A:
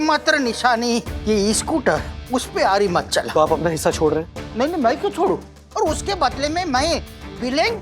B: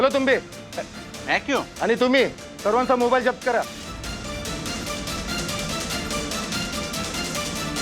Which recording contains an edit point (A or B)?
A